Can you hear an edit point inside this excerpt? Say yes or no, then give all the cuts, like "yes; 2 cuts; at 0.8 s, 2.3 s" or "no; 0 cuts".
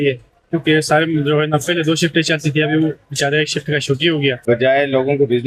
yes; 1 cut; at 4.4 s